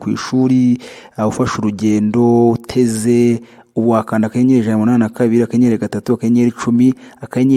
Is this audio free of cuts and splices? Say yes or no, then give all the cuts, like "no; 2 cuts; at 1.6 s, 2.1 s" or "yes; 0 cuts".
yes; 0 cuts